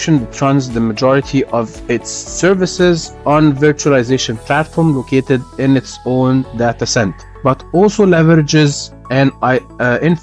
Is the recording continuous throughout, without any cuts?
no; 1 cut; at 7.2 s

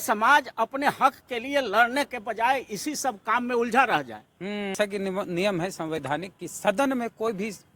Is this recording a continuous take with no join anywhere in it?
no; 1 cut; at 4.7 s

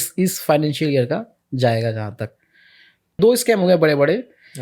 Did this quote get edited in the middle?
yes; 1 cut; at 3.2 s

